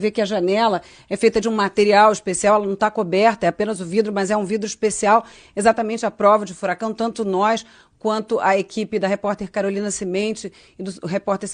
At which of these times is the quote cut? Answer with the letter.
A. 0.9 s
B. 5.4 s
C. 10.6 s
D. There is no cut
B